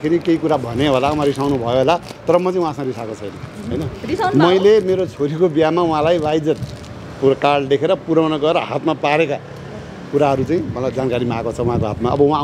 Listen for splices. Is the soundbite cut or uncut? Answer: uncut